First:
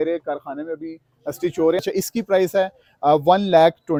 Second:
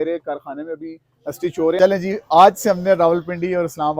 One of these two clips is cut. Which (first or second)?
second